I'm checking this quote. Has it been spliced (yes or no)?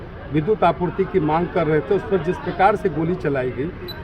no